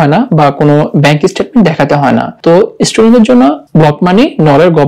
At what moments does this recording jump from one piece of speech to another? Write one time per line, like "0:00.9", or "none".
0:02.3
0:03.6